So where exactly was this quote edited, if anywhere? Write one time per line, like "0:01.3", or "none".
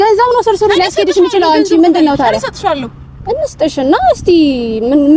none